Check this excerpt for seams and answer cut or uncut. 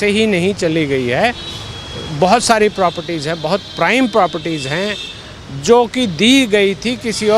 uncut